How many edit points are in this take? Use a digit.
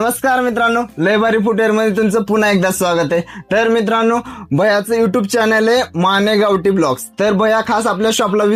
0